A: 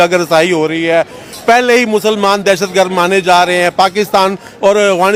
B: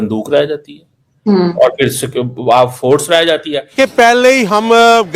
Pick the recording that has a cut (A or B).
B